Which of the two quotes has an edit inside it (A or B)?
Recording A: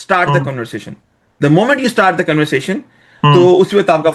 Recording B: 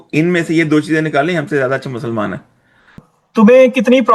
B